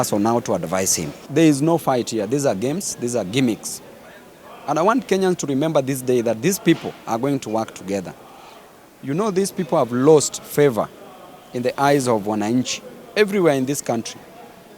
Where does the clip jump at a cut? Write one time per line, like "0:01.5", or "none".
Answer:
0:01.2